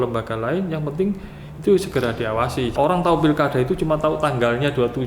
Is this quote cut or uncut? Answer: cut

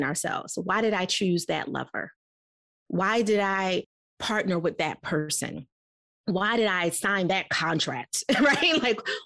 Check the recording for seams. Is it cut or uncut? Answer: uncut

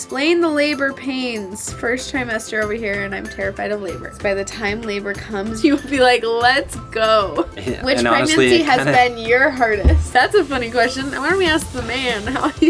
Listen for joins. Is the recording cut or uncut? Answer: cut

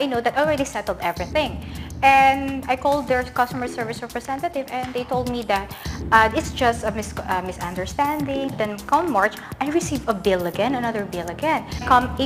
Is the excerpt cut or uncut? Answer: uncut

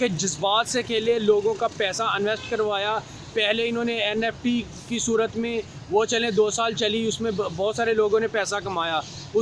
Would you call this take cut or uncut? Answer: uncut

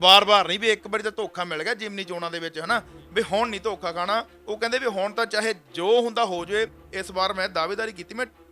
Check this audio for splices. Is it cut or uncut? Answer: cut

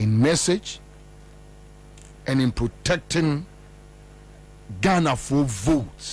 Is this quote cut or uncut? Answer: cut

